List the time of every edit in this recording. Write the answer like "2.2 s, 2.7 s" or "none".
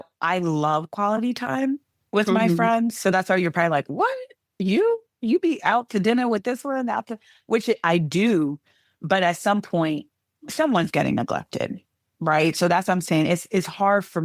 1.9 s